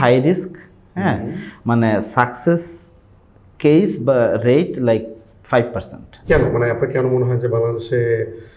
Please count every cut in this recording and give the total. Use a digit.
1